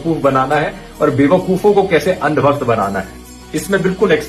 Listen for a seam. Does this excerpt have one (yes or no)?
no